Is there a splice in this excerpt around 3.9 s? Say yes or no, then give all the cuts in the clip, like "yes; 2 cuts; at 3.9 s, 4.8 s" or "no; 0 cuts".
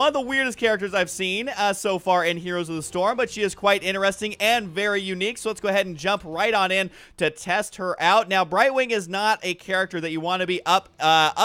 no; 1 cut; at 7.4 s